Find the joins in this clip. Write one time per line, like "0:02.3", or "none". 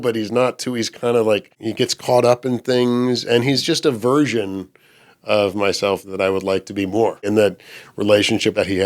0:01.6
0:07.2